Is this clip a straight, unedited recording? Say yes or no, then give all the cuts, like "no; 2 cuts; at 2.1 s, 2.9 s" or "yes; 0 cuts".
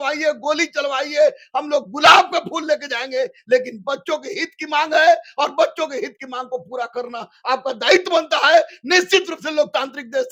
yes; 0 cuts